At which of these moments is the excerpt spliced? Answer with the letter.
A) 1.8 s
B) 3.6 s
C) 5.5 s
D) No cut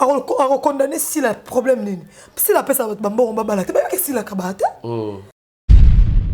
C